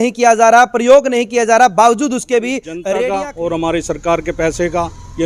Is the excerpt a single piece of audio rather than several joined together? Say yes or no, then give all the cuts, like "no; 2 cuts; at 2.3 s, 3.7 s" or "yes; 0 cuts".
no; 1 cut; at 3.0 s